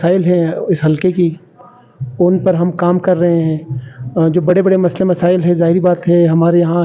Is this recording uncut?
yes; 0 cuts

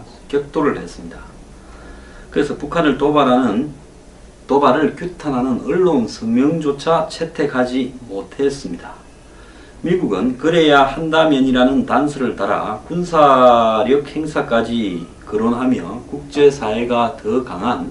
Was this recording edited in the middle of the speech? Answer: yes; 1 cut; at 15.6 s

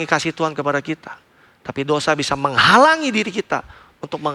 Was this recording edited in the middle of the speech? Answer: no; 0 cuts

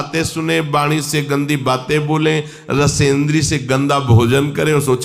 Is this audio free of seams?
yes; 0 cuts

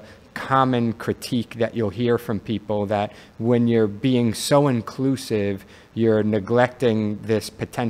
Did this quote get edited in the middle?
no; 0 cuts

